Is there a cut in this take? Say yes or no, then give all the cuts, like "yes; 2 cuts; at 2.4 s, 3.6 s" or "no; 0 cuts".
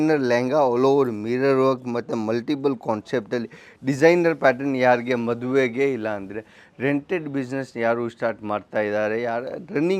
no; 0 cuts